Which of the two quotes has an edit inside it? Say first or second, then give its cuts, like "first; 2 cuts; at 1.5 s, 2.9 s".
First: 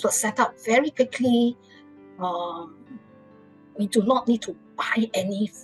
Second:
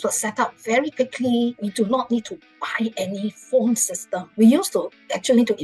second; 2 cuts; at 1.6 s, 4.2 s